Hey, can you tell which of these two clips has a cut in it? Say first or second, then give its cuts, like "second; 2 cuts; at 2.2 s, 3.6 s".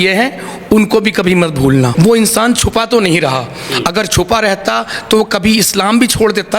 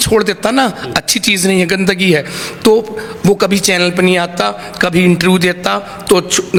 first; 1 cut; at 1.9 s